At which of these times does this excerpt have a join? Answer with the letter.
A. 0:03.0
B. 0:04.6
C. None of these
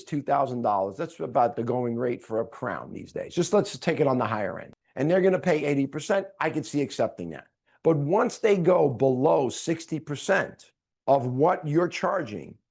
B